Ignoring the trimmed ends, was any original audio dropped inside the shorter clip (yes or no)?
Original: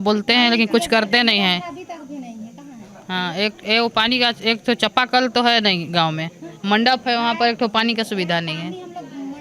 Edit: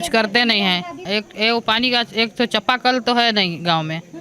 yes